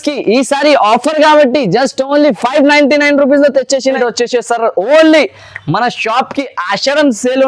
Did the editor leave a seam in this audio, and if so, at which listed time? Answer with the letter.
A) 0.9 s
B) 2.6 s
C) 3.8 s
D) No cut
C